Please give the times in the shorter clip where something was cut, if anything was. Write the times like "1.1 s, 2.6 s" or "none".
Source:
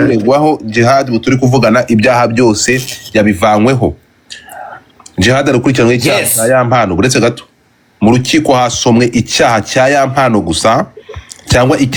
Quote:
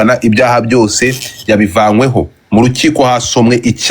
2.4 s